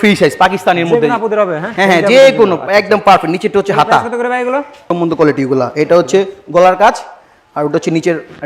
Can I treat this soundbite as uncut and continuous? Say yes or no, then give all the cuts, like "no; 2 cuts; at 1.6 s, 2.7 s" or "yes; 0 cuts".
no; 1 cut; at 4.9 s